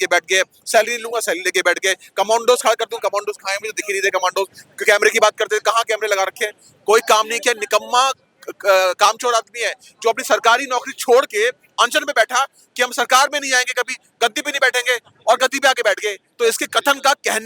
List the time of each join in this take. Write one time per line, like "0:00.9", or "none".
none